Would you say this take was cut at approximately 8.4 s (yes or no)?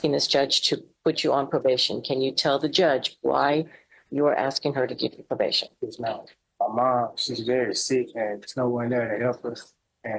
no